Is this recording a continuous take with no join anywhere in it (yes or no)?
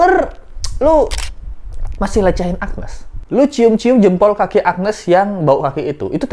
yes